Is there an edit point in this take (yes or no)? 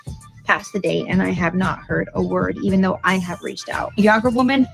no